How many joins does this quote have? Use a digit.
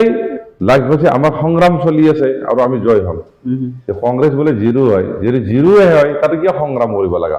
0